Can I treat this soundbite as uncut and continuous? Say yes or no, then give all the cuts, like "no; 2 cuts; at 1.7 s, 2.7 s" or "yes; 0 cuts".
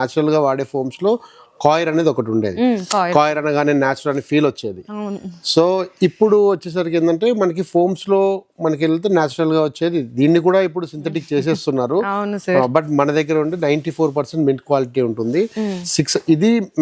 yes; 0 cuts